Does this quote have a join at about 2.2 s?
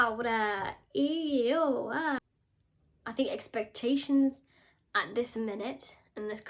yes; 1 cut; at 2.2 s

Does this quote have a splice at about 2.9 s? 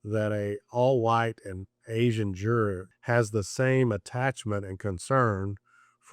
yes; 1 cut; at 2.9 s

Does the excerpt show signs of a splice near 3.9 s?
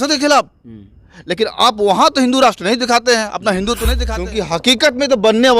yes; 1 cut; at 3.9 s

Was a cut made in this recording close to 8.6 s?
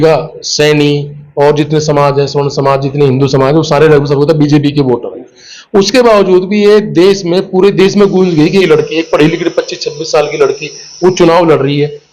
yes; 1 cut; at 8.6 s

